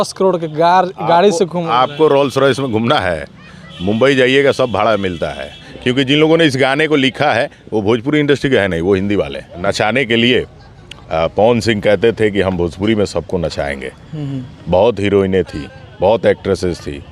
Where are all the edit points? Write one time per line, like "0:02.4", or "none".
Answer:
0:05.6
0:09.4